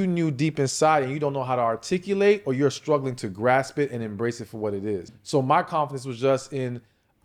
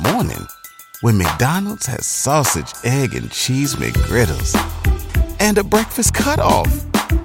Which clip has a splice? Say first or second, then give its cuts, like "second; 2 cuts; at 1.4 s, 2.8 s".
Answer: first; 1 cut; at 5.1 s